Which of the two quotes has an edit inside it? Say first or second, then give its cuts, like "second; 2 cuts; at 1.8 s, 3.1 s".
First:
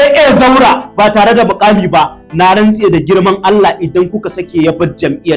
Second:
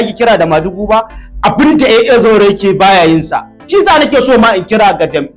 second; 1 cut; at 3.7 s